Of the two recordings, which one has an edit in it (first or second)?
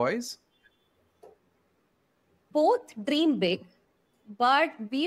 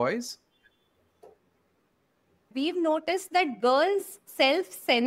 second